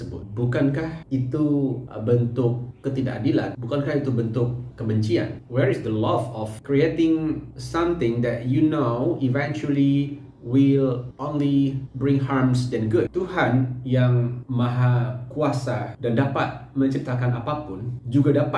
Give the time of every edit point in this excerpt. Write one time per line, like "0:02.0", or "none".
0:13.1